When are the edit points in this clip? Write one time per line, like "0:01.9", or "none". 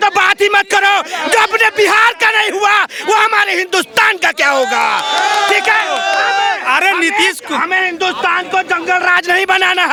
none